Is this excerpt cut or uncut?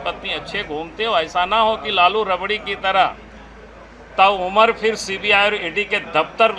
uncut